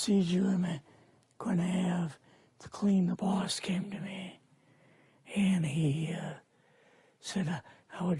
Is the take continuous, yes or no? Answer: yes